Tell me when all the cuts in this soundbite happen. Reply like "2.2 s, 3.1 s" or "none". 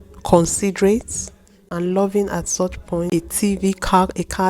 1.7 s, 3.1 s